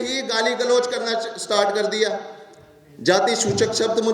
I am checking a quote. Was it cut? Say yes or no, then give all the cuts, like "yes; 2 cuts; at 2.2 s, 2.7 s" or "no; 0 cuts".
no; 0 cuts